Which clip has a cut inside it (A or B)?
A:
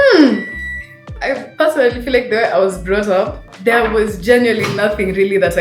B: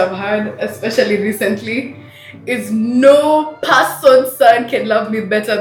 A